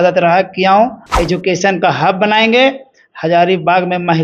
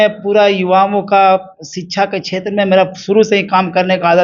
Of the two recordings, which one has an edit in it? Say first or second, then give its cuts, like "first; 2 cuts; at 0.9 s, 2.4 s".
first; 1 cut; at 1.1 s